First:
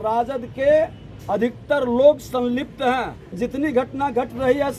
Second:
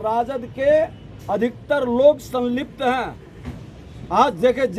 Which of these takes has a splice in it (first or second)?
first